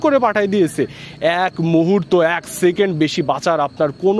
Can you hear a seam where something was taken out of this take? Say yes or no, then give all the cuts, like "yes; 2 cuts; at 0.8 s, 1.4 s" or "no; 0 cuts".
no; 0 cuts